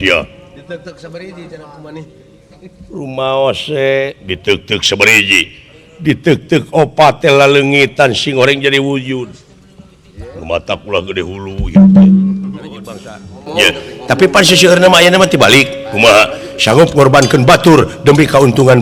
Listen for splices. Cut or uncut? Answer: cut